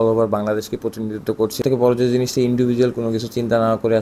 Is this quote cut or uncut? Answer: cut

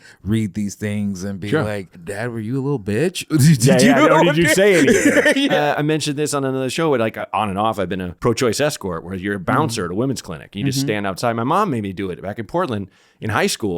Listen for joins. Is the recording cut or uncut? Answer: cut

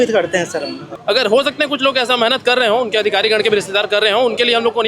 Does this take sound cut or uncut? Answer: cut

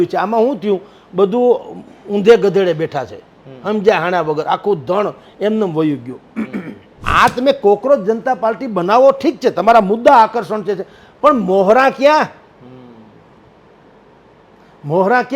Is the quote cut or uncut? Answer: cut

